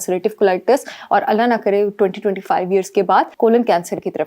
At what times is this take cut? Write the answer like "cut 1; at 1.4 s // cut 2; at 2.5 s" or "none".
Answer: cut 1; at 3.3 s